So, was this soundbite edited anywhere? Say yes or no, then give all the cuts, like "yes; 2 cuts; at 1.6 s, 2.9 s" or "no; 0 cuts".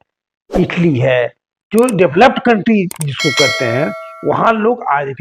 no; 0 cuts